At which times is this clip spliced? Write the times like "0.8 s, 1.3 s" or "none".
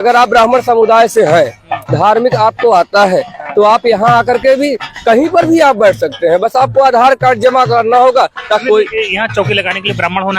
8.6 s